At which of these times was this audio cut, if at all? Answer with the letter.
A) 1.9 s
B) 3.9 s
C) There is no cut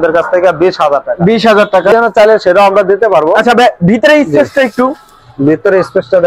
A